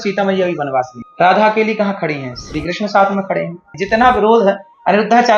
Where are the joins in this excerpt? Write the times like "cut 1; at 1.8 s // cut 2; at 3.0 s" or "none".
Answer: cut 1; at 1.0 s // cut 2; at 3.8 s